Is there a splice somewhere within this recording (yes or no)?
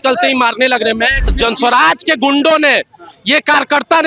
yes